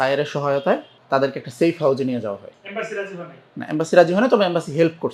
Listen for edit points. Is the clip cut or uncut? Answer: cut